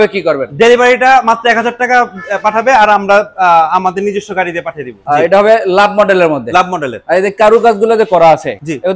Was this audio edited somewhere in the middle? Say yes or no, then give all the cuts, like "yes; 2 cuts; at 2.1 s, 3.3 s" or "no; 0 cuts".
yes; 1 cut; at 5.0 s